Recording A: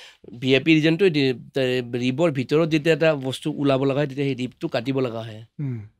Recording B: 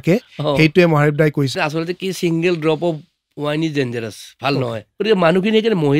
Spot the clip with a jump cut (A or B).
B